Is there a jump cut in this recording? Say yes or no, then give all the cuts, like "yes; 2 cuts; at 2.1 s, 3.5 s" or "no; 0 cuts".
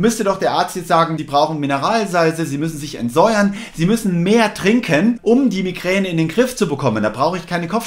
yes; 2 cuts; at 1.2 s, 5.2 s